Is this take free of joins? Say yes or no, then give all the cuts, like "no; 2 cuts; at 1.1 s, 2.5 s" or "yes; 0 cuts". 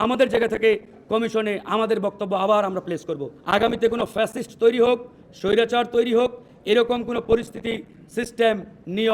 no; 1 cut; at 3.0 s